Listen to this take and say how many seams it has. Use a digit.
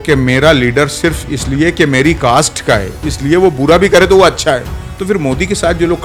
0